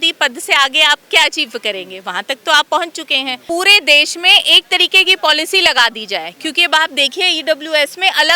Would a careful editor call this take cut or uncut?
cut